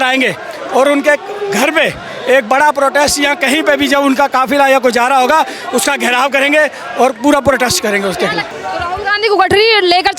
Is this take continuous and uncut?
no; 1 cut; at 8.5 s

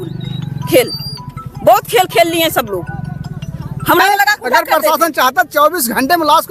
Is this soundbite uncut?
no; 1 cut; at 4.0 s

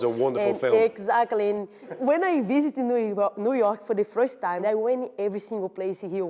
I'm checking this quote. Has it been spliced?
yes; 2 cuts; at 2.0 s, 4.6 s

